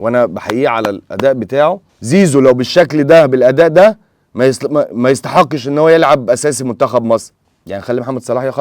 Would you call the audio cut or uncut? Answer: cut